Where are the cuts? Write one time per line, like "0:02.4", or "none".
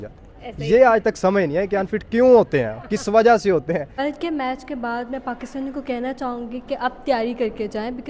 0:03.9